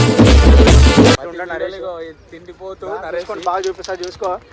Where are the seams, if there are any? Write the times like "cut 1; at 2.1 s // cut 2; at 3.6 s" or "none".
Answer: cut 1; at 1.2 s